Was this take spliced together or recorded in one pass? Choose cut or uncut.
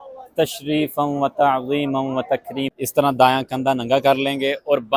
cut